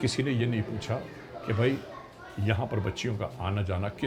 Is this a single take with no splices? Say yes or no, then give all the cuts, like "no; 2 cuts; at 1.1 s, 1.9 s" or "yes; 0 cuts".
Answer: yes; 0 cuts